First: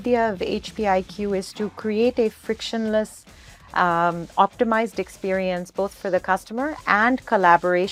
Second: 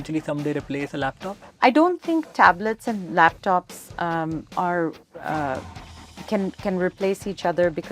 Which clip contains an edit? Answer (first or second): second